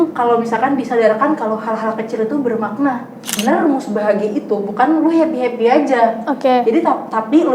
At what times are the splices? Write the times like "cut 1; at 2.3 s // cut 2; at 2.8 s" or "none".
cut 1; at 3.3 s